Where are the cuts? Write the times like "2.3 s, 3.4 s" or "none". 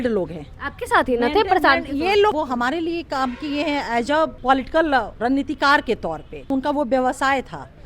2.3 s, 4.4 s, 5.1 s, 6.5 s